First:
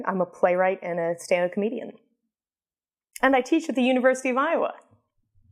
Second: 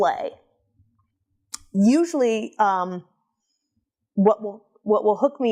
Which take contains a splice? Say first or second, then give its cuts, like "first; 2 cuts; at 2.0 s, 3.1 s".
first; 1 cut; at 4.2 s